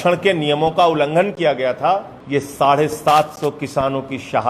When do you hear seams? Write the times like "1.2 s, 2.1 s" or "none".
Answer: 2.1 s